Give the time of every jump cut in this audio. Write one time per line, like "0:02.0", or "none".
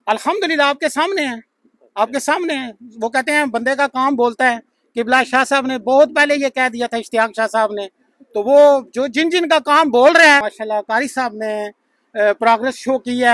0:10.5